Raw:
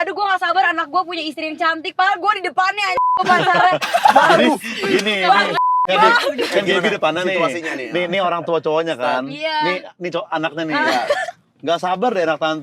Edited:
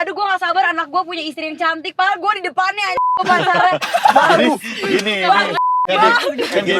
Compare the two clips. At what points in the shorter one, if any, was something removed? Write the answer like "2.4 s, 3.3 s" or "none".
none